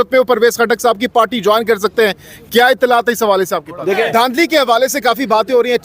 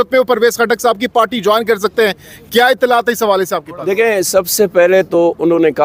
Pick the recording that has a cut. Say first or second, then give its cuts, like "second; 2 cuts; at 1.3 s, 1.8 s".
first; 1 cut; at 4.0 s